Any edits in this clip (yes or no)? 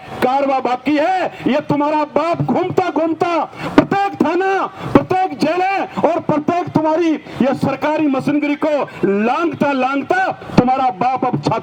no